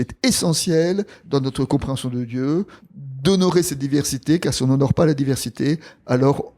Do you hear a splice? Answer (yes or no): yes